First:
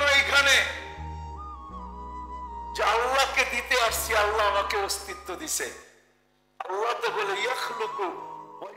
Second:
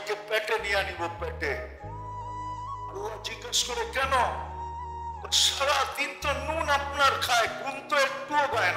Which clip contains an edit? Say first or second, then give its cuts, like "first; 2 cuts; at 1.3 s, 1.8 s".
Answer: second; 2 cuts; at 1.6 s, 2.9 s